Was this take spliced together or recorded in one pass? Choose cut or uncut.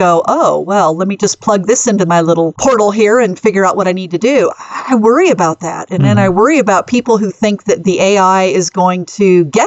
cut